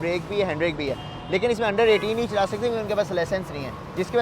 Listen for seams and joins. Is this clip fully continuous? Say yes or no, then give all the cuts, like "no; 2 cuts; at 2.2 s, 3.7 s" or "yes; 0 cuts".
yes; 0 cuts